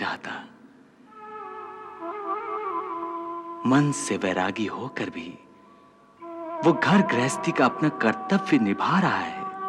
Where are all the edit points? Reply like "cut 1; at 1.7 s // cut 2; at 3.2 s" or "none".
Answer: none